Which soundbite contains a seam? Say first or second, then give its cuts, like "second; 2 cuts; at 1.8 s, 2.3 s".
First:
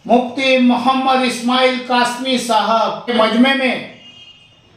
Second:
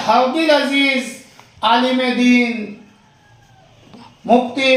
first; 1 cut; at 3.1 s